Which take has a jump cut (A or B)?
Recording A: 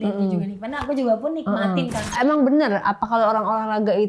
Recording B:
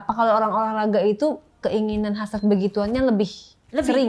A